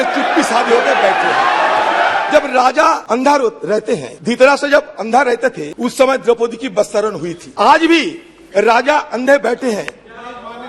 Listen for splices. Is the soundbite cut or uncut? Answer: cut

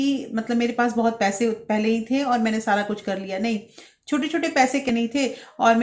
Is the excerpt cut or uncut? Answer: cut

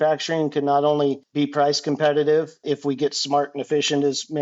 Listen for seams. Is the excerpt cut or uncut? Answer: cut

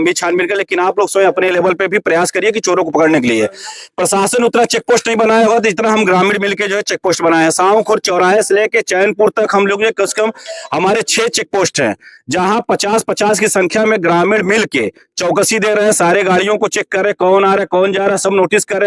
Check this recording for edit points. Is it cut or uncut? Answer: uncut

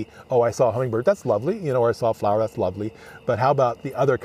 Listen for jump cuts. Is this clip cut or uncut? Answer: uncut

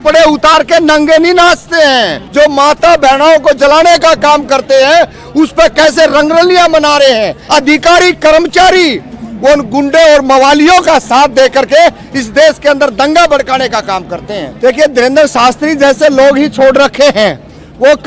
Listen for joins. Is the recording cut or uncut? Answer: cut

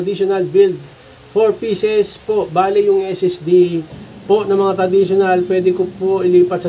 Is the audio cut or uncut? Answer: uncut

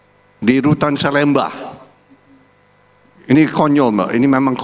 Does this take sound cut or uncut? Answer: uncut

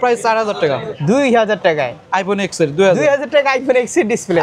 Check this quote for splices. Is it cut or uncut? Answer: cut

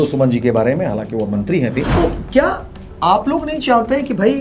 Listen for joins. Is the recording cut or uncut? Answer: cut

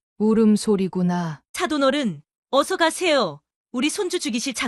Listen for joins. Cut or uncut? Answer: cut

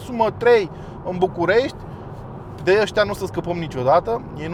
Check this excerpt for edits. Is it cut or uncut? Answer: uncut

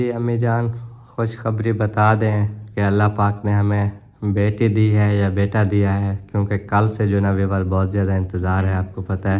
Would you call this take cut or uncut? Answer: uncut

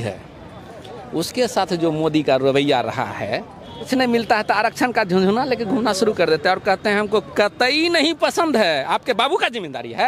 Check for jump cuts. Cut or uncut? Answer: cut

